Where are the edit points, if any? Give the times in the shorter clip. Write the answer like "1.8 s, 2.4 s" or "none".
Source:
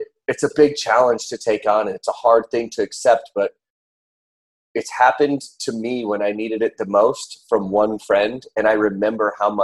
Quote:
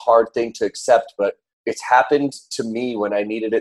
1.5 s